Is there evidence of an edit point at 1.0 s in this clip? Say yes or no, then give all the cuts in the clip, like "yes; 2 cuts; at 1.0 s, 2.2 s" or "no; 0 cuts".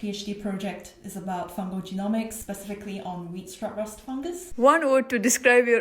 no; 2 cuts; at 2.4 s, 4.5 s